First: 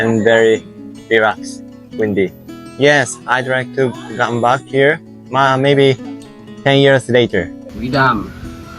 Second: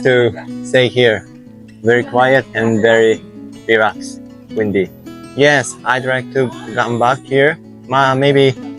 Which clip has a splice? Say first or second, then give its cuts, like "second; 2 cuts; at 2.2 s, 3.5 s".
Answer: first; 1 cut; at 7.6 s